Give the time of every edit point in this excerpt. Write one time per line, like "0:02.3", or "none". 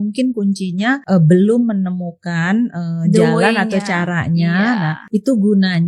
0:01.0
0:05.0